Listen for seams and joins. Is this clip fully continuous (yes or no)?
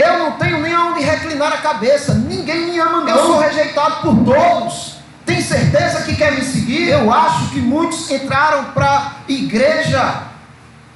no